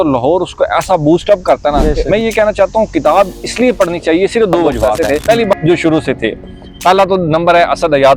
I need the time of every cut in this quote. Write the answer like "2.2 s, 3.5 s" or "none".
2.0 s, 5.5 s